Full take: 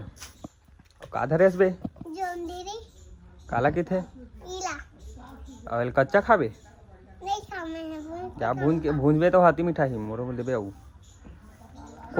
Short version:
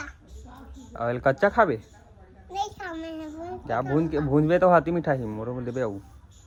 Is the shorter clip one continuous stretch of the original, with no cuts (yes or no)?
yes